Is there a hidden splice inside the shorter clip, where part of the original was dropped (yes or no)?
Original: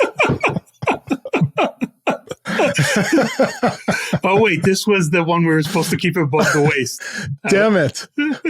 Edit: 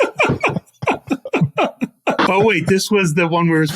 yes